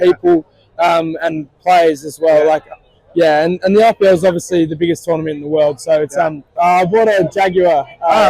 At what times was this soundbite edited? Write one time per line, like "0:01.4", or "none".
0:06.5